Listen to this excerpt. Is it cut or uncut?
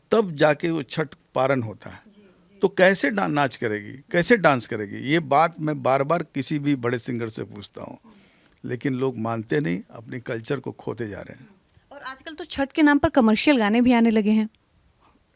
uncut